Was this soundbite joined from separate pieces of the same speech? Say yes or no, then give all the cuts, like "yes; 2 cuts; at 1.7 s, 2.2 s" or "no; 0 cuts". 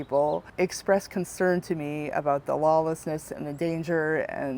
no; 0 cuts